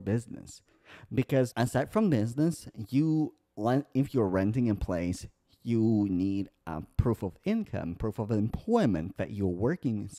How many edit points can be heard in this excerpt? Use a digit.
1